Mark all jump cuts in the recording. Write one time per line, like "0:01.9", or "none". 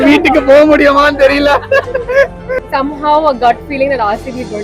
0:02.6

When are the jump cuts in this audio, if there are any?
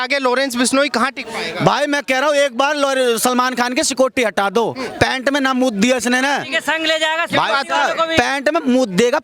none

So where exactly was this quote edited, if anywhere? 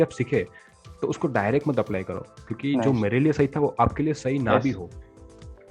none

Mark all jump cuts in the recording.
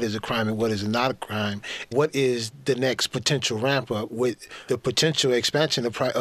0:01.7
0:04.5

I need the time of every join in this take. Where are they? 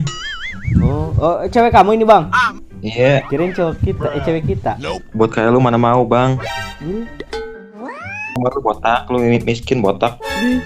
0:08.4

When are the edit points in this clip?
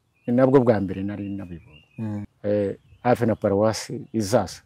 0:02.3

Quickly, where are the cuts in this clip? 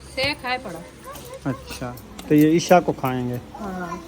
0:02.0

